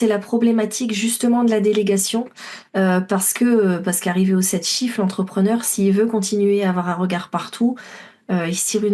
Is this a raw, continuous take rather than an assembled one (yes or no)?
yes